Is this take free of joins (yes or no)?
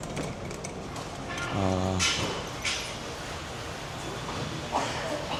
yes